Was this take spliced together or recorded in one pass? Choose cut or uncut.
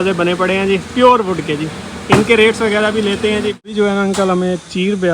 cut